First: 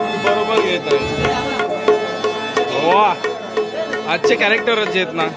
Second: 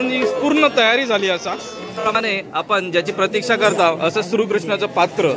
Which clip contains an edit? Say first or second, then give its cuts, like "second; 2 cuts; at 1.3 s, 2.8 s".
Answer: second; 1 cut; at 2.2 s